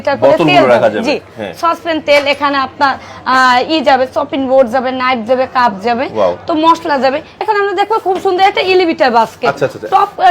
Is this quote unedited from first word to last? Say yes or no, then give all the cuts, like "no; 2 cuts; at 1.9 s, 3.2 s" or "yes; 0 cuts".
no; 1 cut; at 7.4 s